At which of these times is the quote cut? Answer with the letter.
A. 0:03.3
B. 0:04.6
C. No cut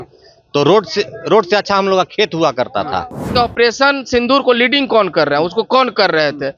A